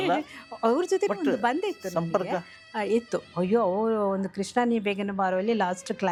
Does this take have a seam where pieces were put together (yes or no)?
no